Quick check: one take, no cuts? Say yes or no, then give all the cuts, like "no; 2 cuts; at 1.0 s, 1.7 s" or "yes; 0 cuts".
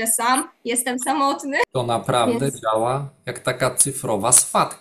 no; 1 cut; at 1.7 s